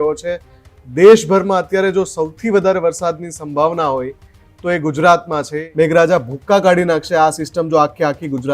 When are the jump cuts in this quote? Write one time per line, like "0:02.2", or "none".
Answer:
0:05.6